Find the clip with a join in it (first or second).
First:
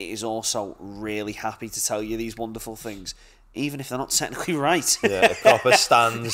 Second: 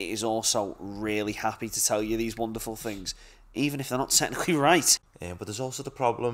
second